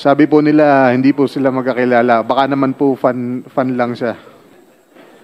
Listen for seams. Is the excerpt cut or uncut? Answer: uncut